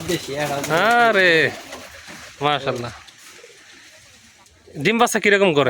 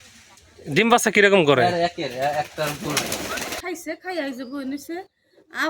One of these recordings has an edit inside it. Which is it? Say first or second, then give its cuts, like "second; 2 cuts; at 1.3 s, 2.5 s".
second; 1 cut; at 3.6 s